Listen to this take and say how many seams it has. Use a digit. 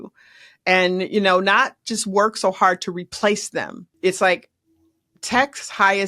1